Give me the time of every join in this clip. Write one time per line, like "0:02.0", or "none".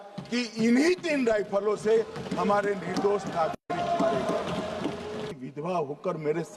0:05.3